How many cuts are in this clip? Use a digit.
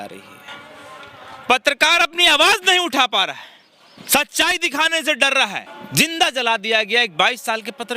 1